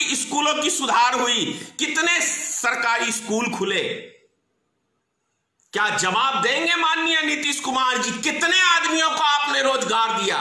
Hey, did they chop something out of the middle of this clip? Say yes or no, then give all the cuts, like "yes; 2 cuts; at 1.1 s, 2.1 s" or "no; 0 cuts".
no; 0 cuts